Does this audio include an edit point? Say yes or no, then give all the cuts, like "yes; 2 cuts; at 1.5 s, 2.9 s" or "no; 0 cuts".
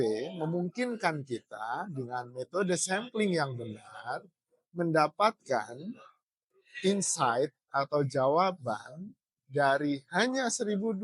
no; 0 cuts